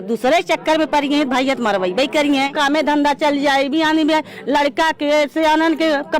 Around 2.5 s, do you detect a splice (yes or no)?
yes